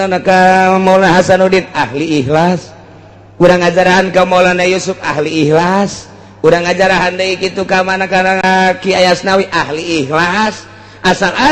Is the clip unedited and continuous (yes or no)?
no